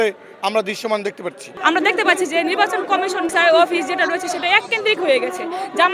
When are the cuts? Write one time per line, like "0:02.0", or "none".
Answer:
0:01.6